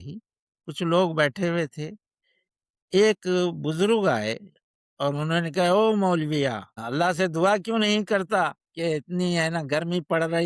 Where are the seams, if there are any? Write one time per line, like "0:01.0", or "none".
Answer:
0:06.8